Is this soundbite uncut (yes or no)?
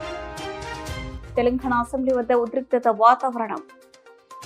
yes